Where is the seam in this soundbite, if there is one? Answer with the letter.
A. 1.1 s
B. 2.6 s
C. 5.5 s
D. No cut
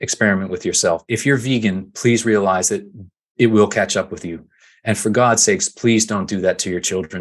A